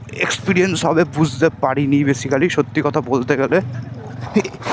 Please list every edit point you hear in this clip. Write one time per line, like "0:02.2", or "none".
none